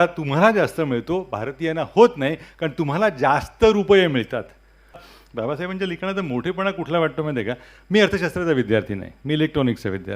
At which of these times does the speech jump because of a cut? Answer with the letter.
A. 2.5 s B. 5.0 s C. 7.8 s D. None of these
B